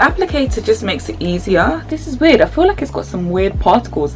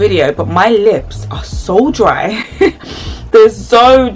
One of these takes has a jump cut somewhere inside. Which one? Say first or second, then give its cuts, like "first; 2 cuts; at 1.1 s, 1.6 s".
first; 1 cut; at 1.9 s